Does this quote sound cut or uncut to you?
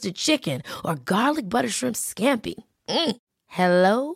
uncut